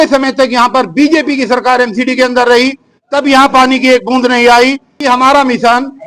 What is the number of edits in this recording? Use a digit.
1